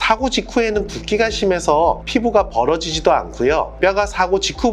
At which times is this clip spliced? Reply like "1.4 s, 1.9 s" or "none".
3.7 s